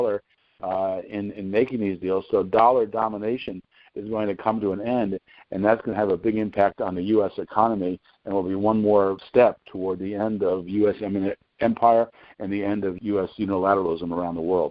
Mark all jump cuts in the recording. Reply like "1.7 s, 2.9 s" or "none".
9.2 s, 13.0 s